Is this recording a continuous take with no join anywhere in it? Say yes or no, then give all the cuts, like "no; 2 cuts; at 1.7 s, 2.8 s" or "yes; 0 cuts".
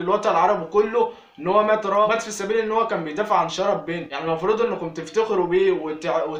yes; 0 cuts